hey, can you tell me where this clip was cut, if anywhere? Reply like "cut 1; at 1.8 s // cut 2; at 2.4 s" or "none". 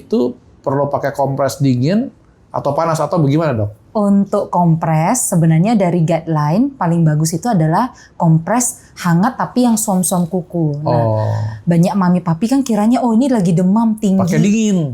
cut 1; at 3.8 s